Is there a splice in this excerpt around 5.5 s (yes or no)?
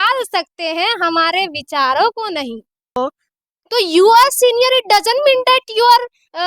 no